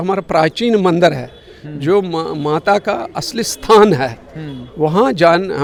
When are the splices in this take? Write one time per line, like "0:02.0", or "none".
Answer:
none